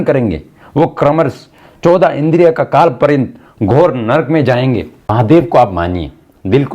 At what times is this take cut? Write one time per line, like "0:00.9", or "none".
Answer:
0:05.1